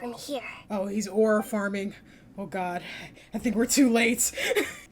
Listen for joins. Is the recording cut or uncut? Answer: uncut